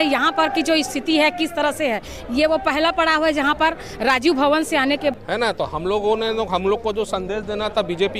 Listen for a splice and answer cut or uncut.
cut